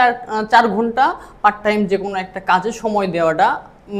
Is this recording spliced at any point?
no; 0 cuts

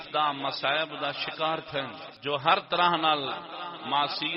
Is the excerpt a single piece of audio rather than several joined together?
no; 1 cut; at 2.0 s

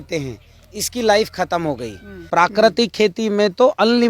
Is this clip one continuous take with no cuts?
no; 1 cut; at 2.2 s

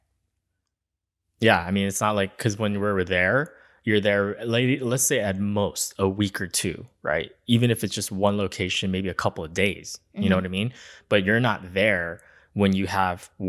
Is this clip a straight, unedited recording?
yes; 0 cuts

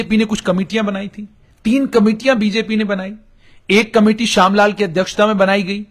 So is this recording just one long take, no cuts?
yes; 0 cuts

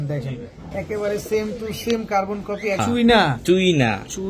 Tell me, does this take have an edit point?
yes; 1 cut; at 2.8 s

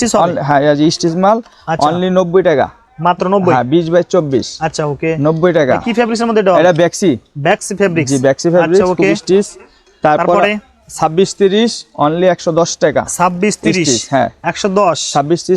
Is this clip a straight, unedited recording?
yes; 0 cuts

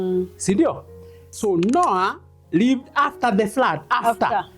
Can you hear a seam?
yes; 1 cut; at 1.3 s

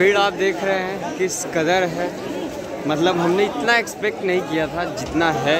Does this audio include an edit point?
no; 0 cuts

